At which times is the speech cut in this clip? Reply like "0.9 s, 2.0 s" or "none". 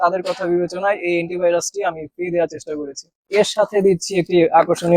3.3 s

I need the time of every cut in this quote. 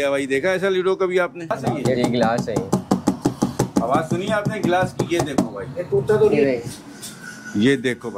1.6 s, 6.4 s

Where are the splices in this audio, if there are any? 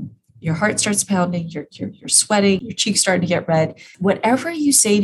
2.6 s, 3.8 s

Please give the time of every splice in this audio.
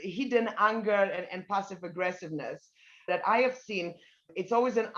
3.1 s

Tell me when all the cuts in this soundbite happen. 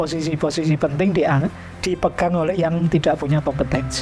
none

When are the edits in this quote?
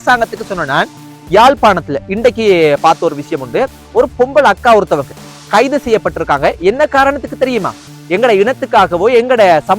1.1 s

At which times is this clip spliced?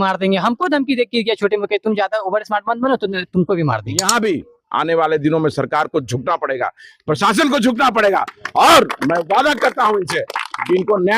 4.1 s

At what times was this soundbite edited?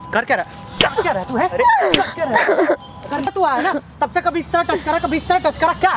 3.3 s

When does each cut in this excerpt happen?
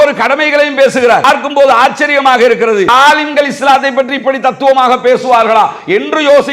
1.2 s, 2.9 s

